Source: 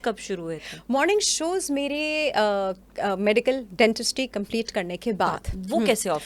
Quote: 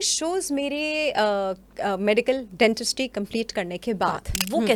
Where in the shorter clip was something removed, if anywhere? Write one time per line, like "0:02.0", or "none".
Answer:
none